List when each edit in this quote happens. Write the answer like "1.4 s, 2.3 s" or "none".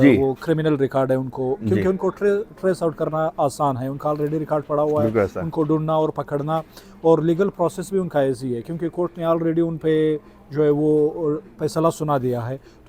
none

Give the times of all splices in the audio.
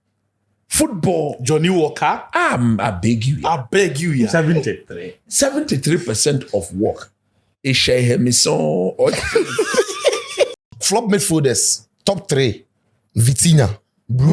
10.6 s

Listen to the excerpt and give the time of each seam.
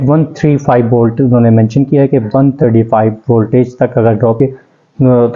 4.4 s

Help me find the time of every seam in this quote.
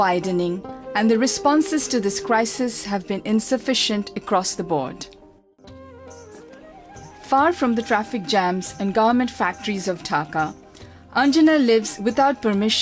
10.0 s

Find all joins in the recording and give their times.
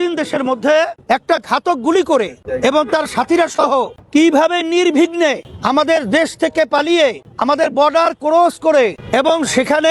1.0 s, 2.4 s, 4.0 s, 5.5 s, 7.3 s, 9.0 s

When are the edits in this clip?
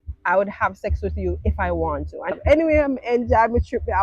2.3 s

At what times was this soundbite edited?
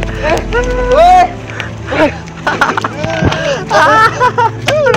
2.3 s

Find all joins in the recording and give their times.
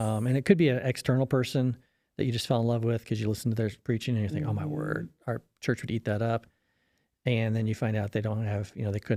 none

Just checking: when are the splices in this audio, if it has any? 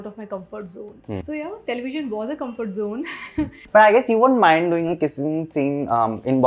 1.2 s, 3.6 s

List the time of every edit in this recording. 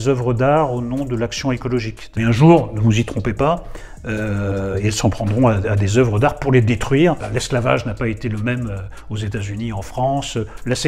2.0 s, 7.3 s

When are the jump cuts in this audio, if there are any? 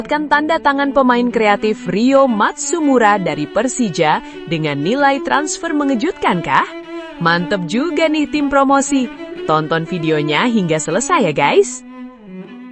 11.7 s

